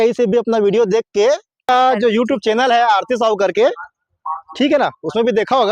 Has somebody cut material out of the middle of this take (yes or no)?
yes